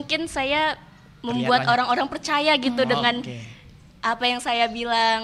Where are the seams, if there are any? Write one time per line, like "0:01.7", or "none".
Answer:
none